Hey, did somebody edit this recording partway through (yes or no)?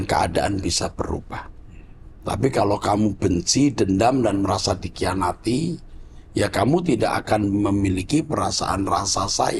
no